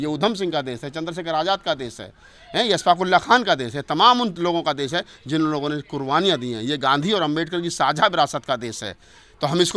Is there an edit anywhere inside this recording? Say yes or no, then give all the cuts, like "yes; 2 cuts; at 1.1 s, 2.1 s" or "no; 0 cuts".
no; 0 cuts